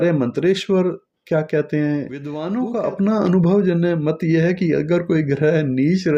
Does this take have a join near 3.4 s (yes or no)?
no